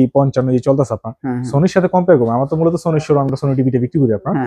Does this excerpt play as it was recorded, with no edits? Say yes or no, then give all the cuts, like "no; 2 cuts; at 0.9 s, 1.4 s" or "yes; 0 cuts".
yes; 0 cuts